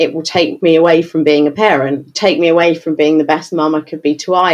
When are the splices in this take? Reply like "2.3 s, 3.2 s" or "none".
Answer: none